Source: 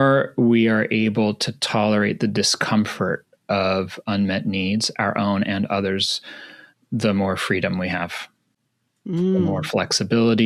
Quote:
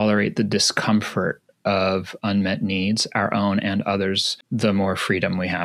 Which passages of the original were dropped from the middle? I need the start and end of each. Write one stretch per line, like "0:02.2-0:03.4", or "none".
0:06.2-0:06.7